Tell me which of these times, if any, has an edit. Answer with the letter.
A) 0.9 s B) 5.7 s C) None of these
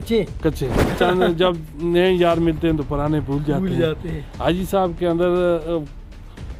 A